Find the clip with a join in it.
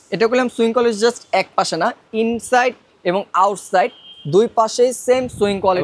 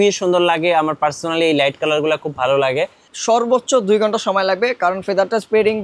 second; 1 cut; at 3.1 s

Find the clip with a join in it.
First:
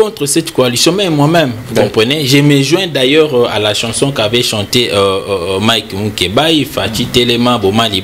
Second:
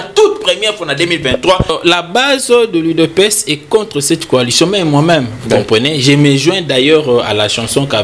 second; 1 cut; at 1.7 s

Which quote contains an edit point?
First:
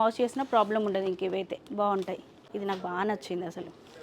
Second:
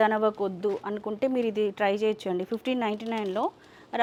first; 1 cut; at 2.3 s

